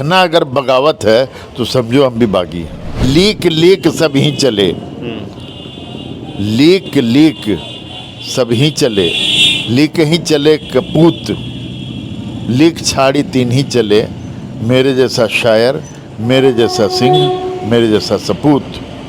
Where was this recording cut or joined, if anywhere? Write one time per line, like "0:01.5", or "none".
0:03.0